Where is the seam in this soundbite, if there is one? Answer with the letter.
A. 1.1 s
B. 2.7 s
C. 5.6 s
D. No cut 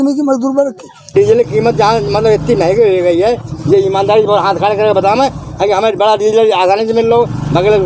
A